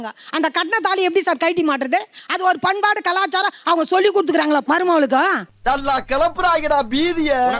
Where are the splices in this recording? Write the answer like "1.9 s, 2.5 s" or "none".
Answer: none